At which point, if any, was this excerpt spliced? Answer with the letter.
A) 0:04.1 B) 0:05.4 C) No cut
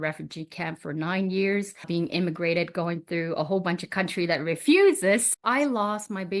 B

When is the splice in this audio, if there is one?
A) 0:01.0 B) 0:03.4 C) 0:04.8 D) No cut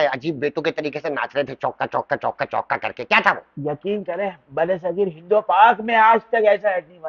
D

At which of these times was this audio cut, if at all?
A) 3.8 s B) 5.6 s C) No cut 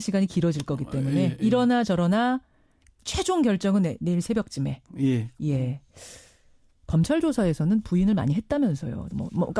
C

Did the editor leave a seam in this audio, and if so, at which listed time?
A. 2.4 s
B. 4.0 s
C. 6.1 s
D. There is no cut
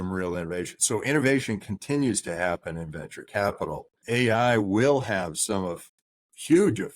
B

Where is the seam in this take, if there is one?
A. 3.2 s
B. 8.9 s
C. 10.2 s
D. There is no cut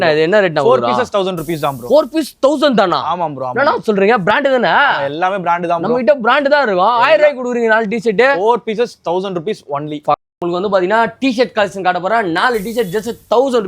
C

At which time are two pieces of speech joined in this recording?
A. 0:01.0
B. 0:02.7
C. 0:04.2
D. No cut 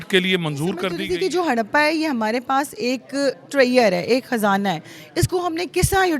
A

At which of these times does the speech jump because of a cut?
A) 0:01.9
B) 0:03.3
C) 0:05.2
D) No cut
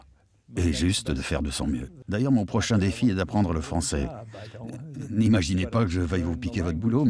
A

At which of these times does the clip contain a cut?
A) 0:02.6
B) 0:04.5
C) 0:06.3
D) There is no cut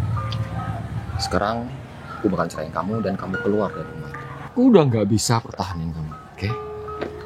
B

